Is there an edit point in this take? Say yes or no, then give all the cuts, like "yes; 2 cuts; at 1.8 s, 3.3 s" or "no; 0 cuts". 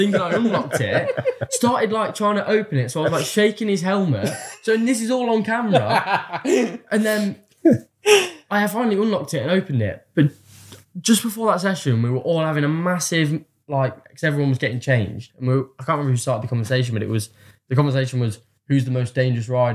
no; 0 cuts